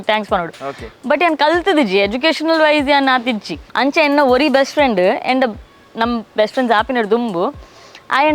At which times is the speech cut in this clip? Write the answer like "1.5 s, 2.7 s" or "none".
3.6 s